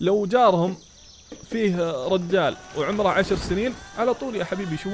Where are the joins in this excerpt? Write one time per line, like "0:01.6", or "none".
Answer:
0:03.9